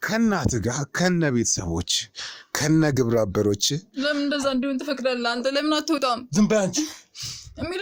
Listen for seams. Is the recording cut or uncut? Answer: uncut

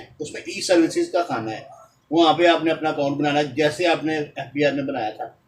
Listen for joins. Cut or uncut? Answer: uncut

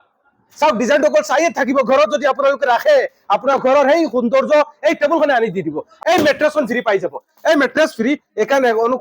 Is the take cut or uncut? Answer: cut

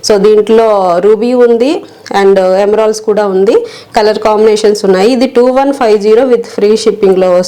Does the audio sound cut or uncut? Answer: uncut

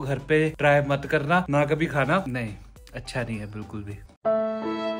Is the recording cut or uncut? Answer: uncut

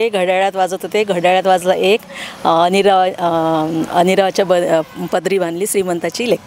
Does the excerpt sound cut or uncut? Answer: uncut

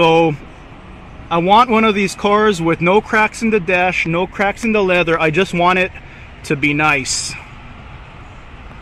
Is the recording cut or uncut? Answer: uncut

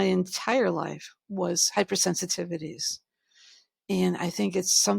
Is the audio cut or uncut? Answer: uncut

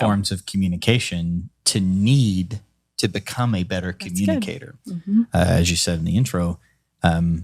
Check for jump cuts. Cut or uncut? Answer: uncut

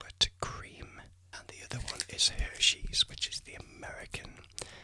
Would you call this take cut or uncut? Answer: cut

